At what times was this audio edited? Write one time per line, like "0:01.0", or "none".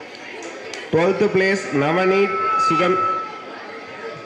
none